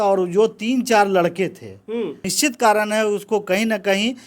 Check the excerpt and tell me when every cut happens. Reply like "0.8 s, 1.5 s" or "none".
2.2 s